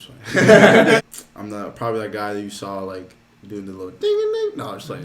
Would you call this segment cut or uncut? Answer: cut